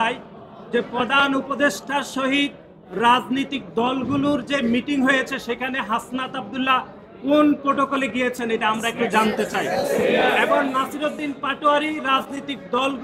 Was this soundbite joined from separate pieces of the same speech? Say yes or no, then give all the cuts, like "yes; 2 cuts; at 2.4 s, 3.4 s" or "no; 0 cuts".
no; 0 cuts